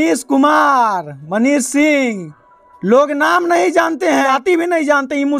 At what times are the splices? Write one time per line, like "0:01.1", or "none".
0:04.3